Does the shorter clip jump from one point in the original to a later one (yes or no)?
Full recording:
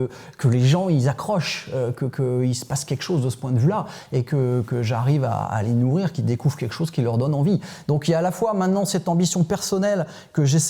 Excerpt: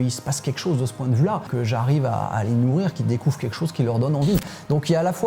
yes